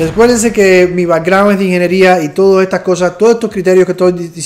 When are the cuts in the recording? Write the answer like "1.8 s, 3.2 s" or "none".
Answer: none